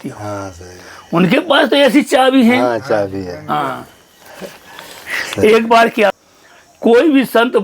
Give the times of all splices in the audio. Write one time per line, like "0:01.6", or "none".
0:06.1